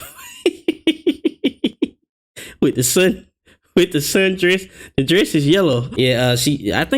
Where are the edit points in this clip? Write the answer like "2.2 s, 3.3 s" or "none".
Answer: 5.9 s